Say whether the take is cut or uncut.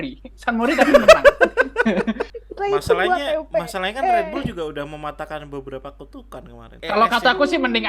cut